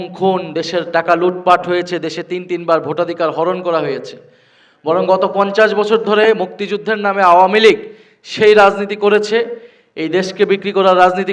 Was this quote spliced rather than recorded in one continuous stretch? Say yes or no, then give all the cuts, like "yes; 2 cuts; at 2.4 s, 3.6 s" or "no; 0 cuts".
no; 0 cuts